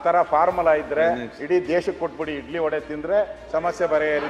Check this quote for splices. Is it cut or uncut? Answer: uncut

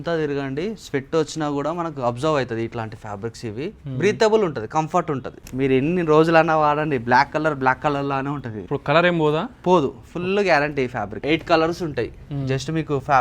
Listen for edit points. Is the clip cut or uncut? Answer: cut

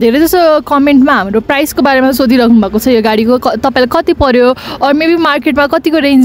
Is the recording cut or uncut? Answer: uncut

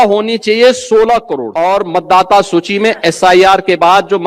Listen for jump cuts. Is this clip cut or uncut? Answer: cut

